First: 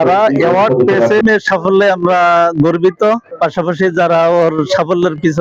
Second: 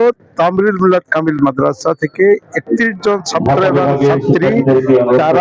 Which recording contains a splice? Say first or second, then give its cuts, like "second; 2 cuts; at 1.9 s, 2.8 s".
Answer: first; 1 cut; at 1.2 s